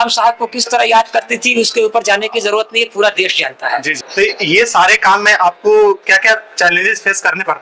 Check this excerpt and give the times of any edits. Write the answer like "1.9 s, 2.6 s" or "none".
4.0 s